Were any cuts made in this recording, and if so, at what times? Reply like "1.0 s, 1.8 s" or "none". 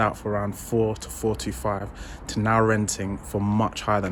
none